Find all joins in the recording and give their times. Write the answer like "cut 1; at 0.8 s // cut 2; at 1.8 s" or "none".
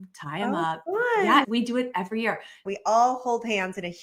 cut 1; at 1.5 s // cut 2; at 2.6 s